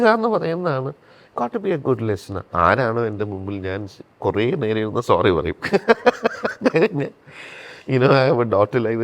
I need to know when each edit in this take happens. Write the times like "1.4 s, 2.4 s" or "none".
2.5 s